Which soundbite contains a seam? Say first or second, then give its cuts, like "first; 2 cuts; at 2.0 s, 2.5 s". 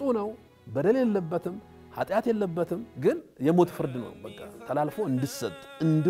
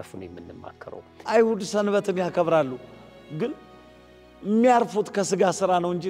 second; 1 cut; at 1.2 s